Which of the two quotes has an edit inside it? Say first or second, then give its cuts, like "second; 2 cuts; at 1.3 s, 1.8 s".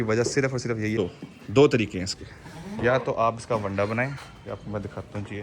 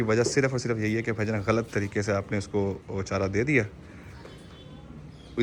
first; 1 cut; at 1.0 s